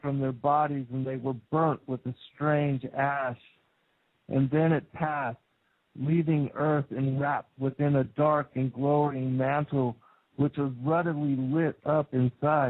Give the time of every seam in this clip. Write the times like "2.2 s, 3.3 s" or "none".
4.9 s